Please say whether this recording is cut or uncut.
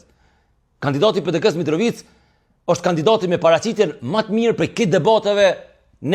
uncut